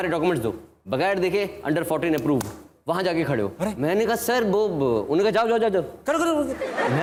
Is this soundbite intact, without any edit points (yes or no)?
yes